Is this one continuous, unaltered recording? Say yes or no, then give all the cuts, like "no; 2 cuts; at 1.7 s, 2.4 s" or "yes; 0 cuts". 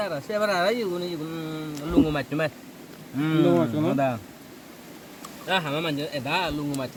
yes; 0 cuts